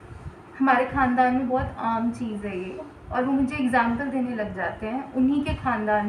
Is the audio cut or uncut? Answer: uncut